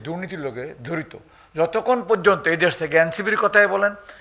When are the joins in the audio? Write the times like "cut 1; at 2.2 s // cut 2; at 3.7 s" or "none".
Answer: none